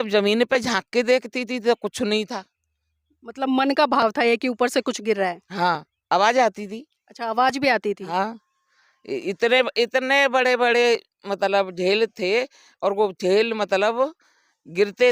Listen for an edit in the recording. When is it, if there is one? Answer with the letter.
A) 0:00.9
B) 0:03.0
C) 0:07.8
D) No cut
D